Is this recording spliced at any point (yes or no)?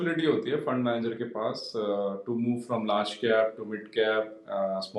no